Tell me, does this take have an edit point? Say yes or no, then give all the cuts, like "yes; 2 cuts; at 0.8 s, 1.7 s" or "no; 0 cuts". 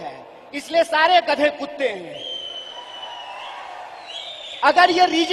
yes; 1 cut; at 3.3 s